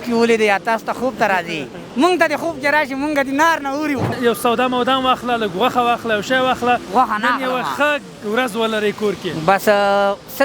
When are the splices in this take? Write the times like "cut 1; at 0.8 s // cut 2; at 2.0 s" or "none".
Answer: cut 1; at 4.1 s